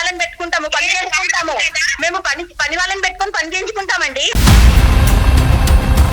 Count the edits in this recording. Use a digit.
1